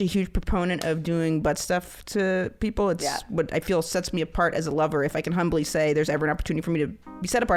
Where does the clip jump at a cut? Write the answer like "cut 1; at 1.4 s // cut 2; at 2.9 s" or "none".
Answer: none